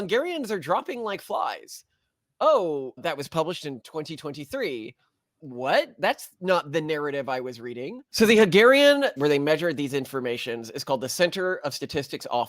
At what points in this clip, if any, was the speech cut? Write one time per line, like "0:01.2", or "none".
0:08.1
0:09.2

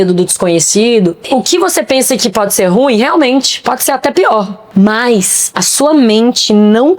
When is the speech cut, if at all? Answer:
0:01.3
0:04.6

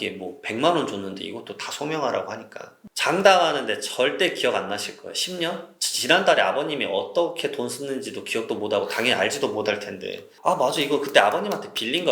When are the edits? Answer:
0:10.3

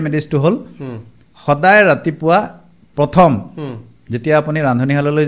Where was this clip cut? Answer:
none

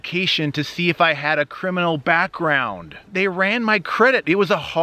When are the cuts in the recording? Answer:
0:03.1

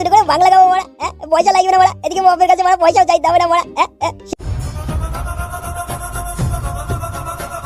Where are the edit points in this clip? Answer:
0:04.2

